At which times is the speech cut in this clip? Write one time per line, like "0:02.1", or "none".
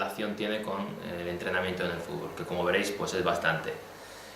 0:02.9